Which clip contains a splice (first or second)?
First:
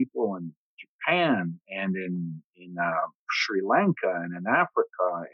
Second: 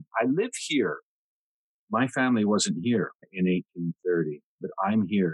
second